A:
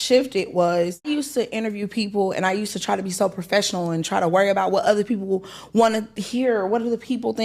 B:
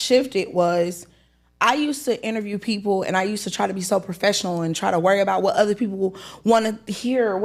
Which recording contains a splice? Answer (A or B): A